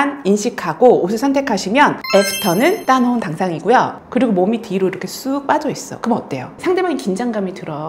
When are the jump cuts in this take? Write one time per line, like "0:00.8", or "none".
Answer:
0:04.0